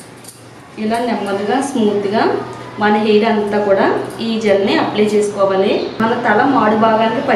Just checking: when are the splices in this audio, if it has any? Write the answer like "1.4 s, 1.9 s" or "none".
6.0 s